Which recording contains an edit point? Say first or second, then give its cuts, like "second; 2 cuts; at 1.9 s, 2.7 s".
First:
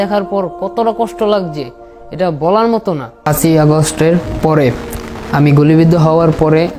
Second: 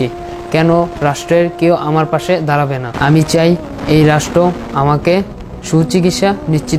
first; 1 cut; at 3.1 s